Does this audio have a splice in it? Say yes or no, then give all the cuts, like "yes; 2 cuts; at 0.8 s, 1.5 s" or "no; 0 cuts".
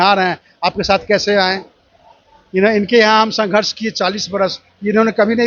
no; 0 cuts